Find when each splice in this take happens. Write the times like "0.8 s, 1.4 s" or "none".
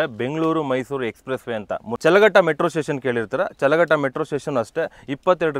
1.9 s